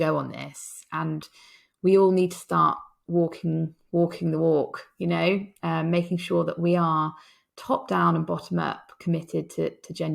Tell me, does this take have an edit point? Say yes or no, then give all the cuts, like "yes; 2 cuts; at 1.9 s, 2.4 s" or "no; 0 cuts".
no; 0 cuts